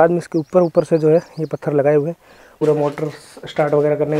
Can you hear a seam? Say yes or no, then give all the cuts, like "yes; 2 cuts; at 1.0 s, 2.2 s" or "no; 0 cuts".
yes; 1 cut; at 2.6 s